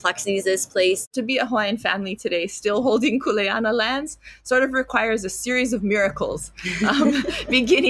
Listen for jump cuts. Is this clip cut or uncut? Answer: cut